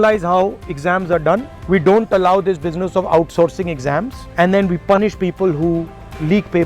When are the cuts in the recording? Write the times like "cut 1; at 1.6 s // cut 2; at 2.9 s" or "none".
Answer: none